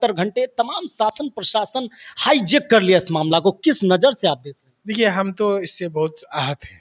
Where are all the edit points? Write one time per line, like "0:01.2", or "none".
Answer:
none